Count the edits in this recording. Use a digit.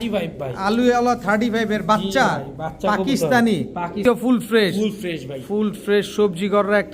1